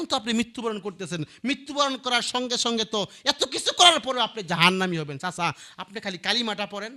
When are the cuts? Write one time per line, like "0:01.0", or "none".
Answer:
none

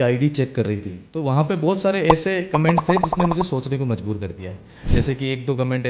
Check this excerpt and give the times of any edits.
none

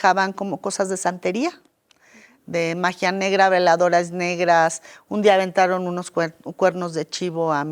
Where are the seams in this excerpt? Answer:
none

